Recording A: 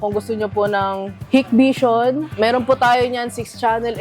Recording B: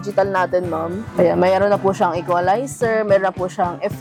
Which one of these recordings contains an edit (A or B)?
A